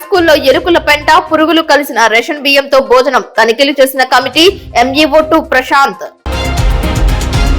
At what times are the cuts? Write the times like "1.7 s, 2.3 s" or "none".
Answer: 6.1 s